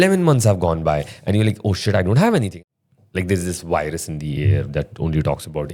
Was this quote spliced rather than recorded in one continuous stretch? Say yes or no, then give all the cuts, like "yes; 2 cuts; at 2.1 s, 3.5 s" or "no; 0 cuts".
yes; 1 cut; at 2.5 s